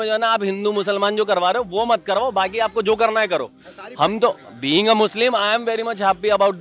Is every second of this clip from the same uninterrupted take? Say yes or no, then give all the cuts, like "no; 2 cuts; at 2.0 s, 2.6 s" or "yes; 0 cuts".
yes; 0 cuts